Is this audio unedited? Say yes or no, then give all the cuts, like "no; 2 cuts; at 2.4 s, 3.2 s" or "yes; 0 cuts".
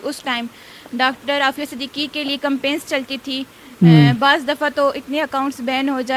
yes; 0 cuts